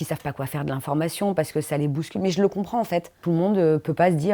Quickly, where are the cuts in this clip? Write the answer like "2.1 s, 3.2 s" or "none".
3.2 s